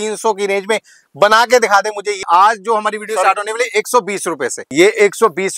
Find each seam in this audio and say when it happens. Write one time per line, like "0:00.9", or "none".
0:02.2
0:04.6